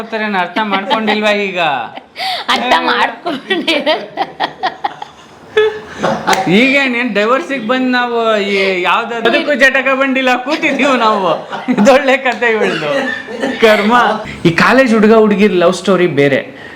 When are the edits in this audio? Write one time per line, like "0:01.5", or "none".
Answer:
0:09.2
0:14.2